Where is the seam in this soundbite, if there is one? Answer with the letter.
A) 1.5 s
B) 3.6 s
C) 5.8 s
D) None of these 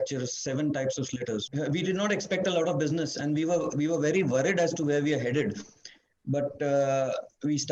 A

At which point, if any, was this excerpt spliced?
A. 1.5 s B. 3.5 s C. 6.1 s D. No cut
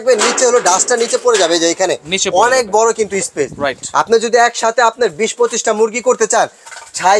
D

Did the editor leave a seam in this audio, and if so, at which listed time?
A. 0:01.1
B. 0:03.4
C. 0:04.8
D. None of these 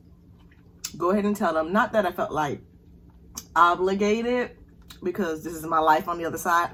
D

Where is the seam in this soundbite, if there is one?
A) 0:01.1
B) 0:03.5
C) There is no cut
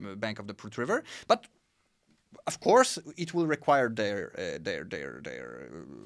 C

